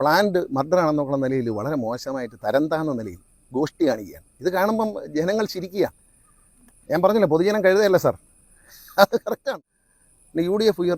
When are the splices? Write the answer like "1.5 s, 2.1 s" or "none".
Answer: 9.4 s